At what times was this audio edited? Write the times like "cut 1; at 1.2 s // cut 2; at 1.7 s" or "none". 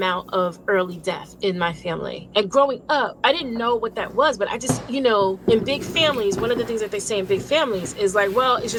none